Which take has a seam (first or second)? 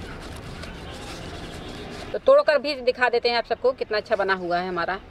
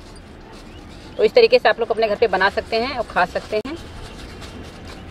first